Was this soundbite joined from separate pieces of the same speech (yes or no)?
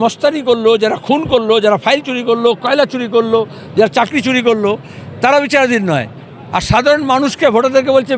no